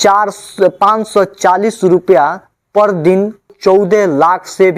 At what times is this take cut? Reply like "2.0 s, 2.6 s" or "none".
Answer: 3.5 s